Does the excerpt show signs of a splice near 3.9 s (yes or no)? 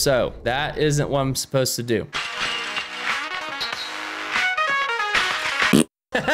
no